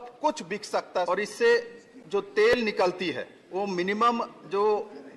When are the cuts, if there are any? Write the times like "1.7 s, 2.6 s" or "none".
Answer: 1.1 s, 3.3 s